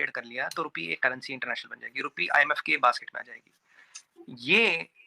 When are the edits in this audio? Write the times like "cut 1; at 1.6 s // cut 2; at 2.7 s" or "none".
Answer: none